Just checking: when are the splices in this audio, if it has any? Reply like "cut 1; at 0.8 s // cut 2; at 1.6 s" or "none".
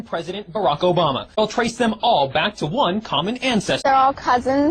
cut 1; at 1.4 s // cut 2; at 3.9 s

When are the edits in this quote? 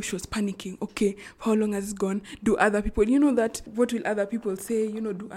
none

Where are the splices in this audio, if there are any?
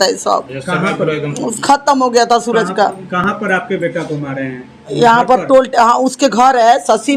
none

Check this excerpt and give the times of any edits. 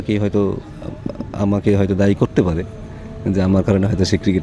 none

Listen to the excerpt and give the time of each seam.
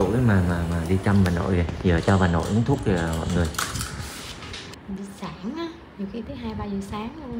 cut 1; at 4.7 s

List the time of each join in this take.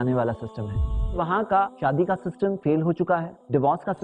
cut 1; at 1.2 s

